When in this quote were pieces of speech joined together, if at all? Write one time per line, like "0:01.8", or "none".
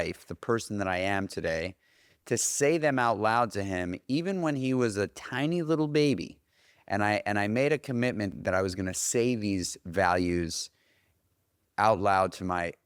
0:08.3